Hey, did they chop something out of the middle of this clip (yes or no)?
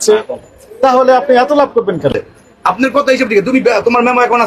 yes